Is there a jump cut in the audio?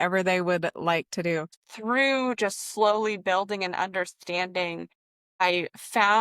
yes; 1 cut; at 1.5 s

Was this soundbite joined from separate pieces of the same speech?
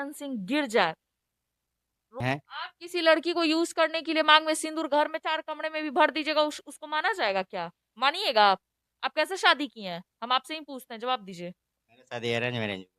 yes; 1 cut; at 2.2 s

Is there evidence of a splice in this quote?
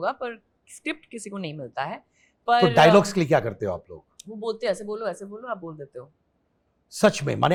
no; 0 cuts

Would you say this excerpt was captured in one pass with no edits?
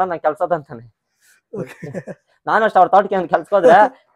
yes; 0 cuts

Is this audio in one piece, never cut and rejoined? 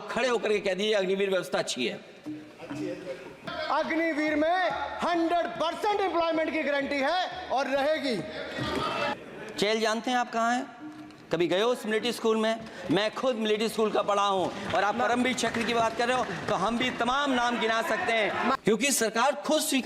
no; 3 cuts; at 3.5 s, 9.1 s, 18.6 s

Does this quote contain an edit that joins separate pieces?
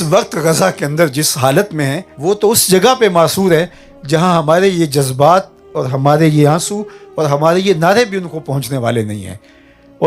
yes; 1 cut; at 2.1 s

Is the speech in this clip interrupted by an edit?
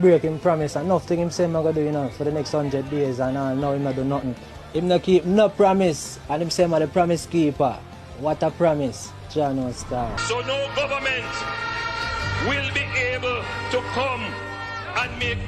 yes; 1 cut; at 10.2 s

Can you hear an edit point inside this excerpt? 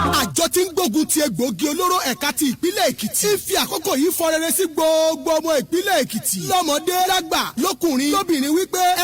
no; 0 cuts

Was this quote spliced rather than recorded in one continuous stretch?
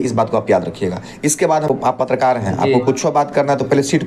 yes; 1 cut; at 1.7 s

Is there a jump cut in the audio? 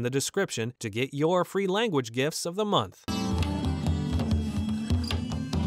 yes; 1 cut; at 3.0 s

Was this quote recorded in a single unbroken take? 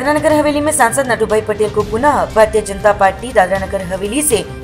yes; 0 cuts

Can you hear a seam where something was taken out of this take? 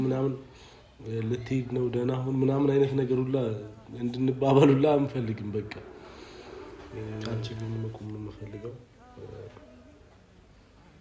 yes; 1 cut; at 7.3 s

